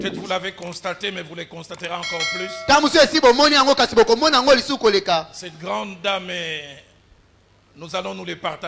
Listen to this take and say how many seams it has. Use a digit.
0